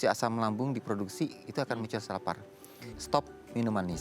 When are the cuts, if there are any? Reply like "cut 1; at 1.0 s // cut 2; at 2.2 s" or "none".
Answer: cut 1; at 2.9 s